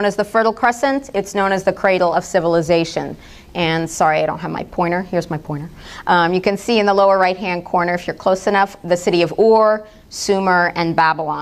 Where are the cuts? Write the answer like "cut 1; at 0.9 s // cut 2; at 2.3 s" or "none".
cut 1; at 8.1 s

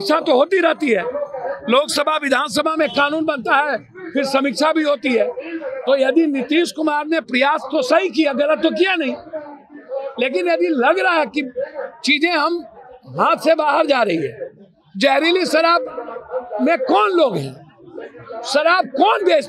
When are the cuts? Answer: none

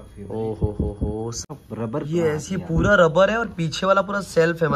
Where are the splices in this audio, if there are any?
cut 1; at 1.5 s

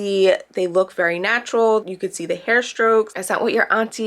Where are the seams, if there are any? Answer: cut 1; at 1.8 s

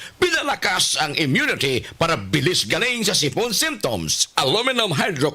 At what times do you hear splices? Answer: cut 1; at 4.3 s

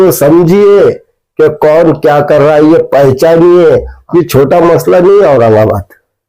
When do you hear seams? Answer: cut 1; at 4.0 s

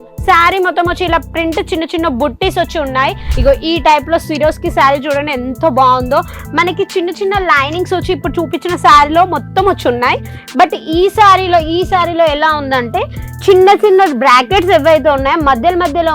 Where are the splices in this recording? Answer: cut 1; at 3.3 s

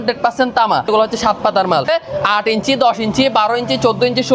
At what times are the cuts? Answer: cut 1; at 0.9 s // cut 2; at 1.9 s

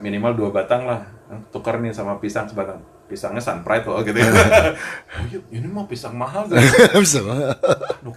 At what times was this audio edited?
none

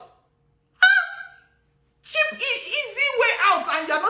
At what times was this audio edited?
none

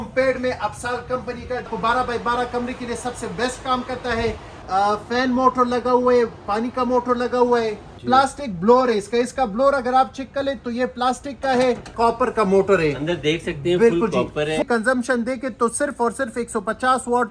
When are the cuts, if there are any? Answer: cut 1; at 1.7 s // cut 2; at 4.5 s // cut 3; at 7.9 s // cut 4; at 11.9 s // cut 5; at 14.6 s

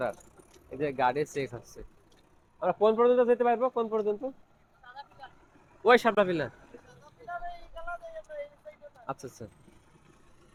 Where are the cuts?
none

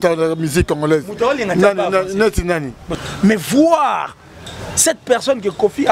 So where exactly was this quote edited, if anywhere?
cut 1; at 2.8 s

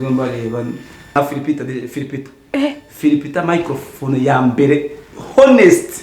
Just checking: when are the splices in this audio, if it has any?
cut 1; at 1.1 s

